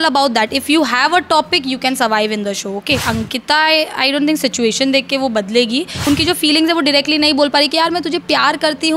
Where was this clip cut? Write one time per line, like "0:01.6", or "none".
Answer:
0:03.0
0:06.0